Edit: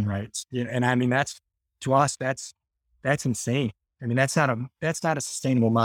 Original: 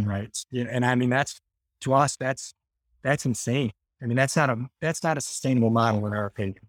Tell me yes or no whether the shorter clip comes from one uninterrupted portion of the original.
yes